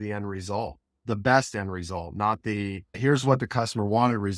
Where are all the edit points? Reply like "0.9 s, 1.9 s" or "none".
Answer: 0.9 s, 3.0 s